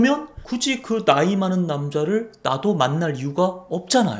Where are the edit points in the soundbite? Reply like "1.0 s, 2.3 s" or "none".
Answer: none